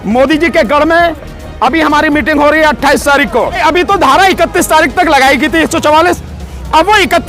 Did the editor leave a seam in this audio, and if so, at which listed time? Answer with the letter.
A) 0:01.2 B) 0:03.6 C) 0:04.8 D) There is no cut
B